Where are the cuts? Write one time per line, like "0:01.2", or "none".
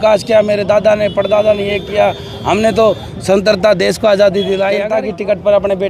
0:04.9

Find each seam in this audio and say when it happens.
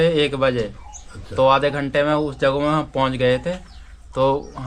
none

